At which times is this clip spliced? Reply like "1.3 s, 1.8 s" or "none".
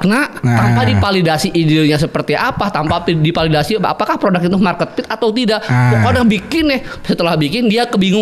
none

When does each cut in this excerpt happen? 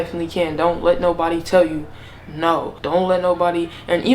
2.7 s

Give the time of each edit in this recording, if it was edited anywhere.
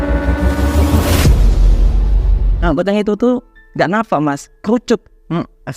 2.5 s

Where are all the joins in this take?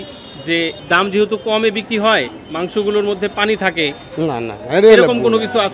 none

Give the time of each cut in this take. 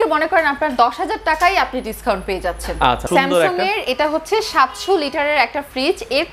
3.0 s

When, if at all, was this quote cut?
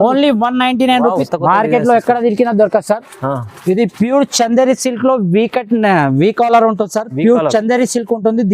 1.2 s

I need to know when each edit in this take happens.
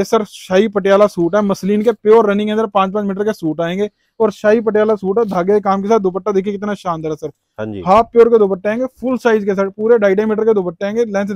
none

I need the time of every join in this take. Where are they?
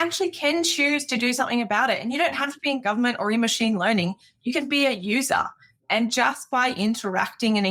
none

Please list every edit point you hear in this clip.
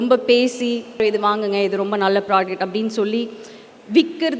1.0 s

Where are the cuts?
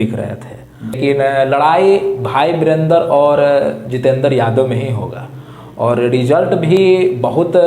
1.0 s

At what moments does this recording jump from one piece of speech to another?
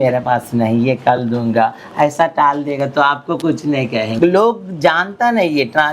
4.1 s

